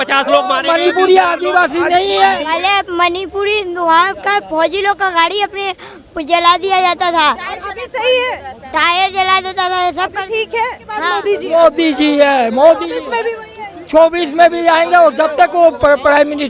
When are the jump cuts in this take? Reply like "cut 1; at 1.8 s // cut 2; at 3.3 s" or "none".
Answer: cut 1; at 2.5 s // cut 2; at 11.1 s